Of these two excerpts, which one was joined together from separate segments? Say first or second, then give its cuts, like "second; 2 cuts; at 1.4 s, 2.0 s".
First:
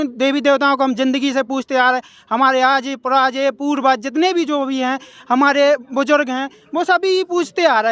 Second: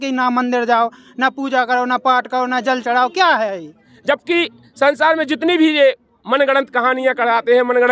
second; 1 cut; at 3.9 s